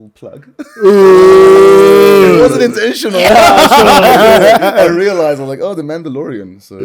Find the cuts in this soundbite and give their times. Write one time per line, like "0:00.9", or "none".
none